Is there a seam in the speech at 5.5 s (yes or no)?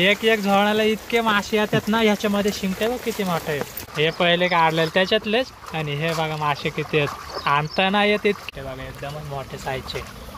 no